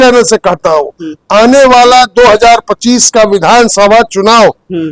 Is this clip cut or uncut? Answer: uncut